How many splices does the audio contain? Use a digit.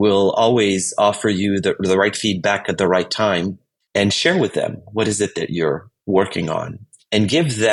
0